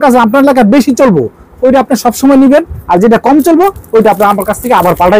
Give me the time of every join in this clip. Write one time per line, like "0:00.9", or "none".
none